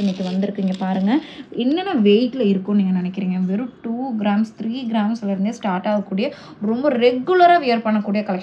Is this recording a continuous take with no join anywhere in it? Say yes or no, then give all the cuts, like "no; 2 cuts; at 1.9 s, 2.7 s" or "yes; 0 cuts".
yes; 0 cuts